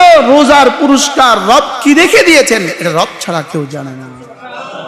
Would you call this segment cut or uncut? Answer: uncut